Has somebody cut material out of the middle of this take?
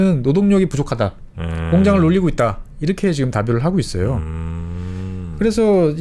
no; 0 cuts

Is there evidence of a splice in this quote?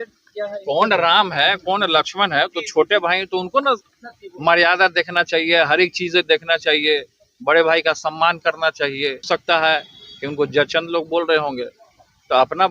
yes; 1 cut; at 9.3 s

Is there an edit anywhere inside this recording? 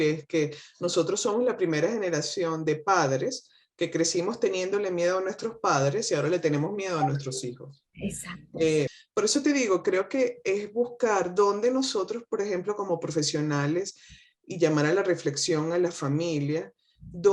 yes; 1 cut; at 9.0 s

